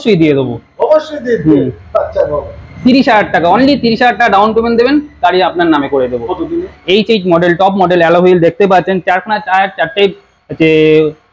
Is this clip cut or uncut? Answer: cut